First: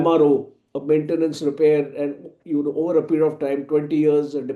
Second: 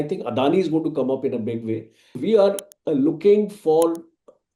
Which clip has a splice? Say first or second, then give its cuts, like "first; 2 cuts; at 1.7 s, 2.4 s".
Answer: second; 1 cut; at 2.2 s